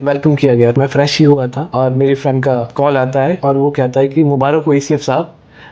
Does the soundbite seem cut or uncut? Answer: cut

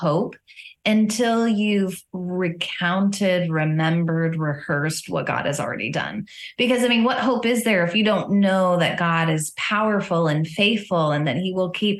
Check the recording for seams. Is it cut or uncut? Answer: uncut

